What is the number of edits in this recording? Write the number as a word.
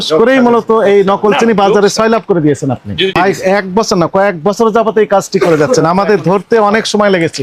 one